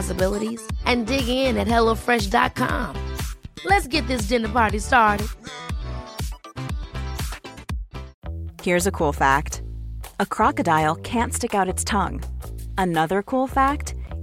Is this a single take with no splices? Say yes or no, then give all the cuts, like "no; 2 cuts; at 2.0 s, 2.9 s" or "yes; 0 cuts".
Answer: no; 1 cut; at 8.1 s